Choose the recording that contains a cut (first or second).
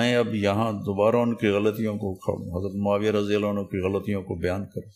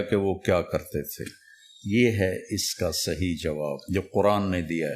second